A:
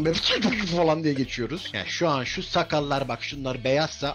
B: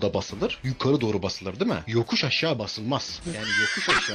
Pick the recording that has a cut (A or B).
A